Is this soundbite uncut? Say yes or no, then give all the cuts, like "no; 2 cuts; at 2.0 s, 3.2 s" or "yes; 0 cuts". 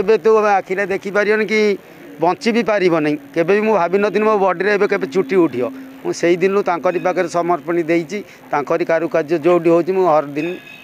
yes; 0 cuts